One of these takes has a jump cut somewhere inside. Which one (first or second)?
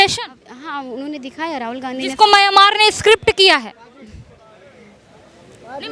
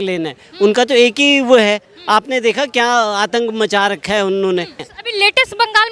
second